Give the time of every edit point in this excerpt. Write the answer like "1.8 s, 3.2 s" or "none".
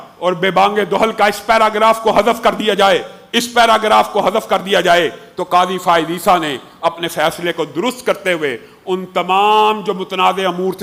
none